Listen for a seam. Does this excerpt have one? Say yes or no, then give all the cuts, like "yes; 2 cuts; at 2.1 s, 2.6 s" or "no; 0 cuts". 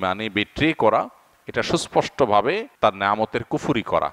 yes; 1 cut; at 2.7 s